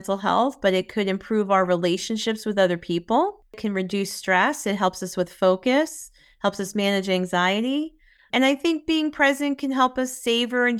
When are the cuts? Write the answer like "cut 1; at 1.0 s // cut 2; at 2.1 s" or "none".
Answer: cut 1; at 3.6 s